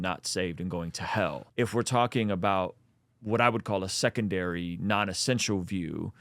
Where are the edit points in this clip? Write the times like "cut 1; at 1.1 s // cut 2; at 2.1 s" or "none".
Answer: cut 1; at 1.4 s